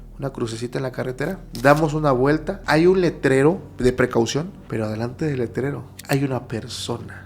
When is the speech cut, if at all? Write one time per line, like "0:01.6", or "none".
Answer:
0:01.5
0:02.5
0:03.7
0:04.6
0:05.9